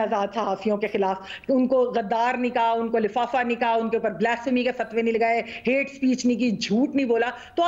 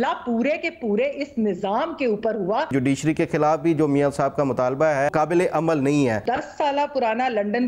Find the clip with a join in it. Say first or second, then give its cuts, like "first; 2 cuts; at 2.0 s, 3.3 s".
second; 3 cuts; at 2.7 s, 5.1 s, 6.2 s